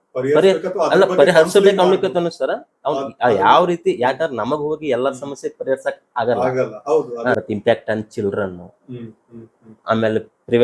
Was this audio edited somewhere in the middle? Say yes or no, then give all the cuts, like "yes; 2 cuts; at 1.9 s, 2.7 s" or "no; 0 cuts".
yes; 1 cut; at 7.3 s